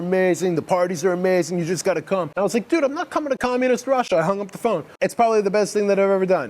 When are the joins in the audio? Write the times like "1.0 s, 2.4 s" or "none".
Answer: 2.3 s, 4.9 s